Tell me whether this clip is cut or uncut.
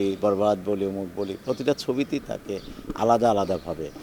uncut